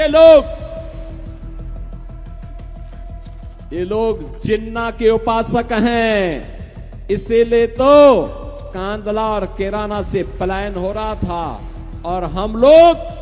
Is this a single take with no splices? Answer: no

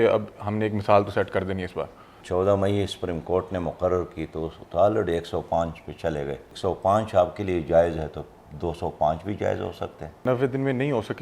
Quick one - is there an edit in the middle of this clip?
yes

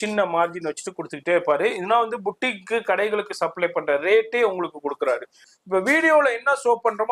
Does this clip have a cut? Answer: yes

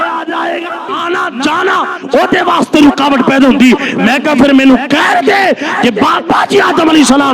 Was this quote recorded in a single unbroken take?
no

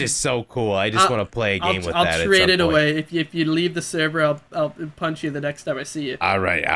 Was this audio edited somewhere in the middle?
no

